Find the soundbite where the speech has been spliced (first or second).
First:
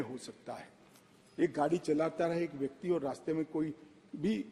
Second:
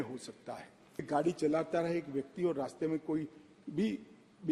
second